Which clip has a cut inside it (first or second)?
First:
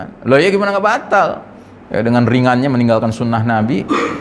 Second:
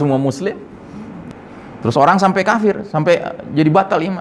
second